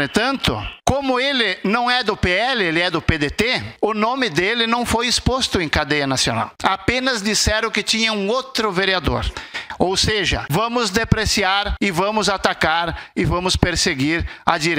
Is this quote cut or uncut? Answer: cut